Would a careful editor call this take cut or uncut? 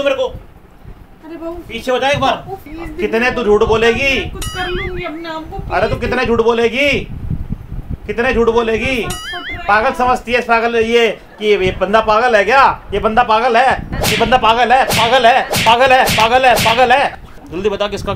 cut